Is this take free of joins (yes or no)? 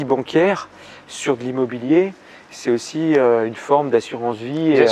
yes